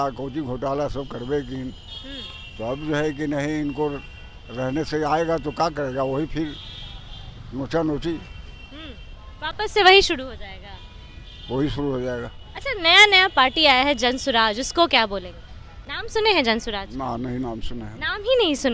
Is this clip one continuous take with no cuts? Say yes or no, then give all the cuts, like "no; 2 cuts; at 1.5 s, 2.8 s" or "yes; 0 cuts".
yes; 0 cuts